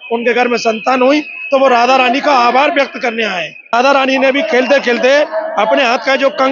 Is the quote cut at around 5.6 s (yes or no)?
no